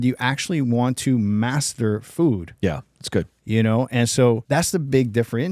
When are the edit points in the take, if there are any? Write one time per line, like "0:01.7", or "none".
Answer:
0:04.4